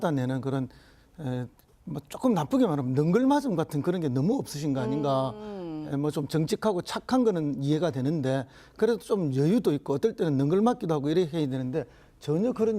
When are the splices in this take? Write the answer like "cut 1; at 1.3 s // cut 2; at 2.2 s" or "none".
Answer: cut 1; at 6.4 s